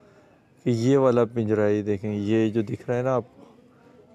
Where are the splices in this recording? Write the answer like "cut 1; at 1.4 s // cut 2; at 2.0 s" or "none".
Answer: none